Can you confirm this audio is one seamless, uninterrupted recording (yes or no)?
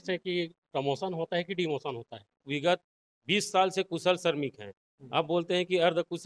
no